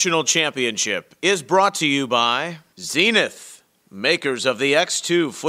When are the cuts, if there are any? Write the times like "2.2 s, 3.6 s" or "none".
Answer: none

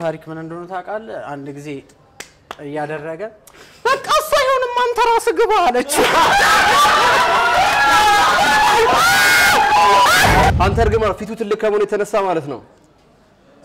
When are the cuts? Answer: 10.5 s

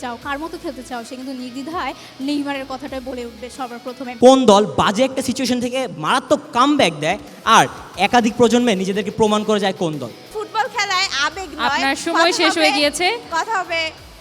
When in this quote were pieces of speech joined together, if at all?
4.0 s, 10.4 s

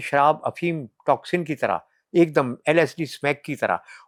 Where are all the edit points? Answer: none

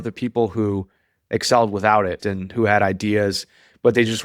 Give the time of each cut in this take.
2.2 s

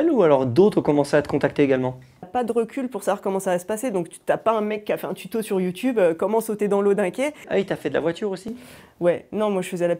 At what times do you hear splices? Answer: 2.3 s, 7.4 s

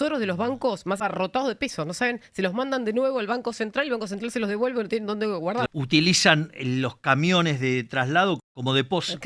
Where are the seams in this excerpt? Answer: 1.0 s, 5.7 s, 8.4 s

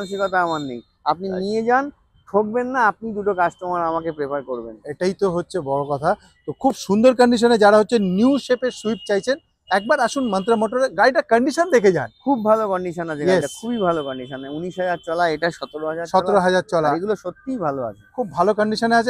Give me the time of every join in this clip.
none

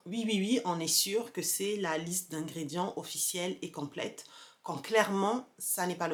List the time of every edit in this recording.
none

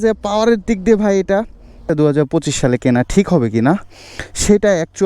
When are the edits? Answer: 1.9 s

